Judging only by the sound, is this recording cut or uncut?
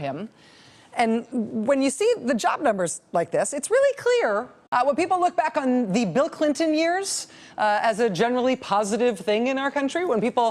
uncut